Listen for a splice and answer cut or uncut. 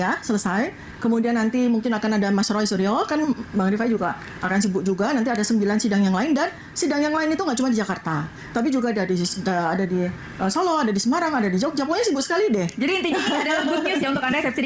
uncut